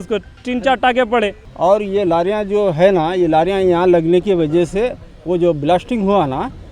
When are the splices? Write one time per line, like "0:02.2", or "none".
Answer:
0:01.4